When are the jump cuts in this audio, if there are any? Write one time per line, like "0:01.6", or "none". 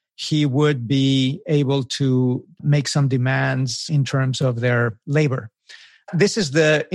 0:02.6
0:03.8
0:06.1